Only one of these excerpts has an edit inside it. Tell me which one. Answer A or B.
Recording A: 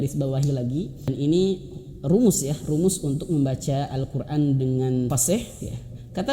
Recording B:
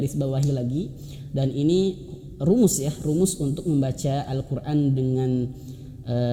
A